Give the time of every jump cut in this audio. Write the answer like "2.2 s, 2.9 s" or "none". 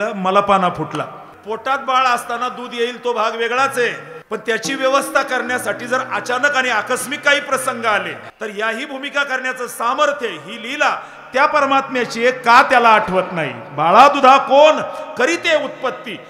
1.3 s, 4.1 s, 8.2 s